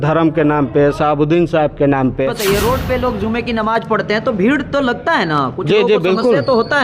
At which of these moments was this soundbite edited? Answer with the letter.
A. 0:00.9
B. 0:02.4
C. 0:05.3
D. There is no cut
B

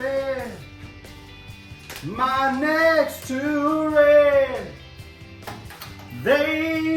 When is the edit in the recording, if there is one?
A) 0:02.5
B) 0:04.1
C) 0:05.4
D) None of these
D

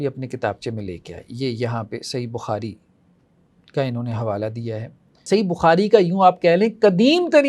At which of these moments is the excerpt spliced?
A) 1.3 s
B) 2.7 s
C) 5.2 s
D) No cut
C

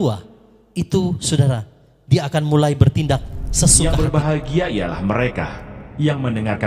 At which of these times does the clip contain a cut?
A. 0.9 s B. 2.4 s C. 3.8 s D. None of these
C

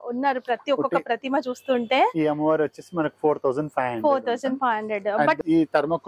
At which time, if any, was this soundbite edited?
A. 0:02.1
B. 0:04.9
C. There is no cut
C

